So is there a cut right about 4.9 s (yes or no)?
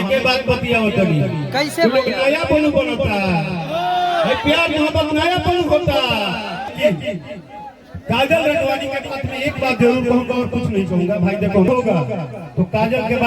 no